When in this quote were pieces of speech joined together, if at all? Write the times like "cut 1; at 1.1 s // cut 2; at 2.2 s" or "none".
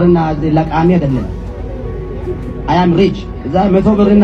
cut 1; at 3.3 s